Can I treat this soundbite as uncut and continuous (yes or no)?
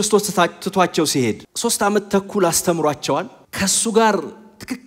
no